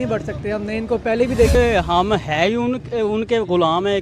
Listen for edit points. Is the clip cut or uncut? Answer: cut